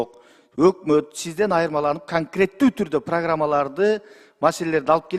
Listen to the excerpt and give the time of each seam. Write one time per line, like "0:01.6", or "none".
none